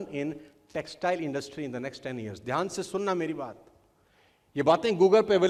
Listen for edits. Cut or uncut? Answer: uncut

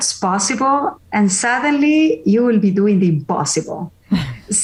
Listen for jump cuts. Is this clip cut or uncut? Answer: uncut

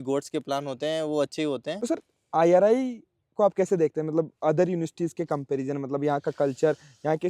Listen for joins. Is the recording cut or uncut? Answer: cut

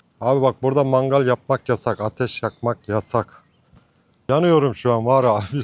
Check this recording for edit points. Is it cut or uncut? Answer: cut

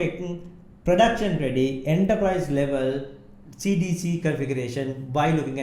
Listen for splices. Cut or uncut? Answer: uncut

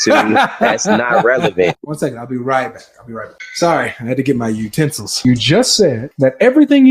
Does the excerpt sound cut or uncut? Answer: cut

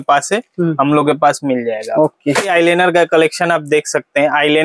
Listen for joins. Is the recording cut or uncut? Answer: uncut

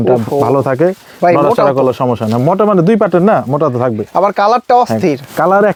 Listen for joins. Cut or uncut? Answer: uncut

